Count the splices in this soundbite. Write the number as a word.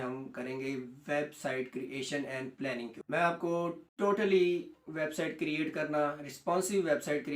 two